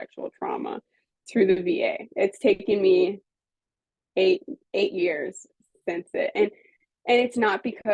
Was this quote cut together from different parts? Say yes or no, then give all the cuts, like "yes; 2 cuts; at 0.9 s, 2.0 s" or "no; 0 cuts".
no; 0 cuts